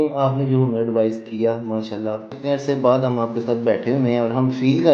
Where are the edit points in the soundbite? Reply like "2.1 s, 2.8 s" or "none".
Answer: 2.3 s

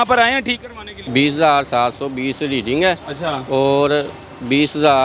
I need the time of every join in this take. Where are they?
1.0 s

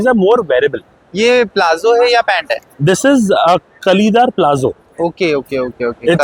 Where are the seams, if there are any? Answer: none

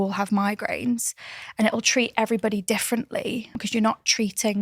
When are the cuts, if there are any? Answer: 3.6 s

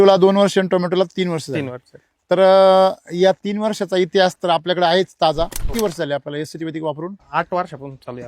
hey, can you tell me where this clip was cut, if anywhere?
5.6 s, 7.2 s

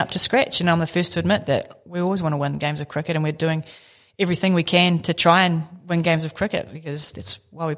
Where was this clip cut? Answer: none

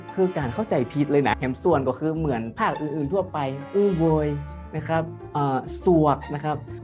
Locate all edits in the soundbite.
1.4 s, 3.6 s

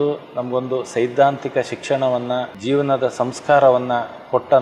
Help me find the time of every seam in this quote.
2.5 s

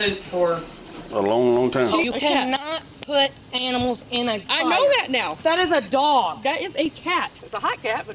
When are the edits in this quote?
2.1 s, 5.3 s, 7.4 s

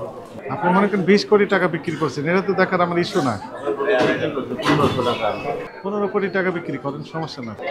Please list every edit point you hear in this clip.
none

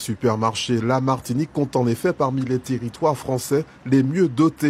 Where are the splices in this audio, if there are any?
none

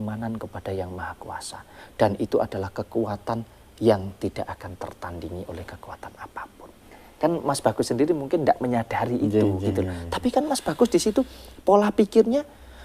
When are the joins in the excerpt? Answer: 7.0 s

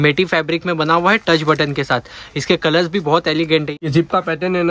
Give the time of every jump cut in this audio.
3.7 s

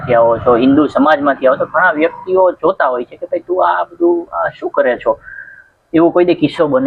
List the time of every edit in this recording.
none

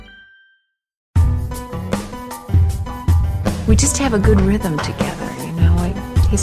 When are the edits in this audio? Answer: 1.2 s

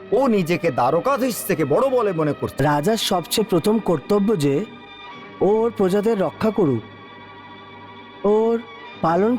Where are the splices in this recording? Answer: 2.5 s

